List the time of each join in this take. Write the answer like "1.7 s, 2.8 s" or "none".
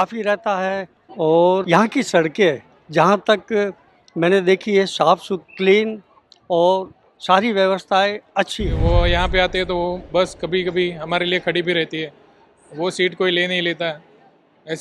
8.8 s